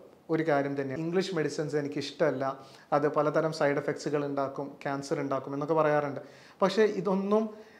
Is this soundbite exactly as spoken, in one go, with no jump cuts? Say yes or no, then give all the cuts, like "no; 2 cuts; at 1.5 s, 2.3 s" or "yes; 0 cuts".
no; 1 cut; at 0.9 s